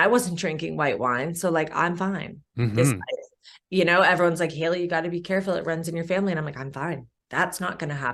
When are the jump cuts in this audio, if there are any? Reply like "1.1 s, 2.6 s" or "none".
7.2 s